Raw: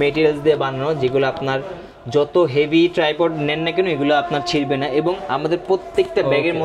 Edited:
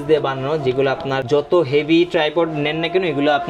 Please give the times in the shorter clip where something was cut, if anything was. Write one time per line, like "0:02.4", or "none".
0:01.2